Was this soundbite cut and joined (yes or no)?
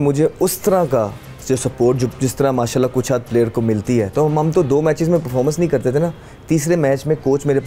no